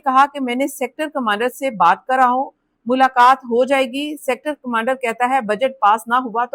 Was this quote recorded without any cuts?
yes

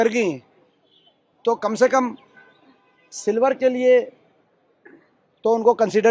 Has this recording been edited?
no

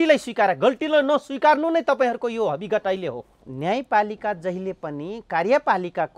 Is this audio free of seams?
no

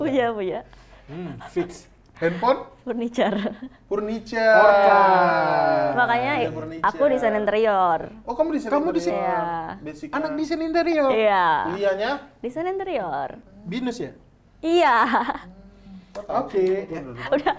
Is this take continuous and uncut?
no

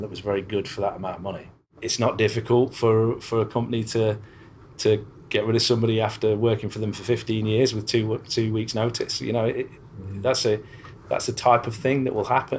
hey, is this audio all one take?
no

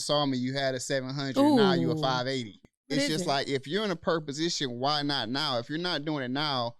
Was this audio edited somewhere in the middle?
yes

